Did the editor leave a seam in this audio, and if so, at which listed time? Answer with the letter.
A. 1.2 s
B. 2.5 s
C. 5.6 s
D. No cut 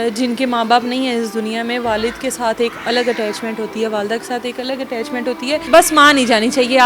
C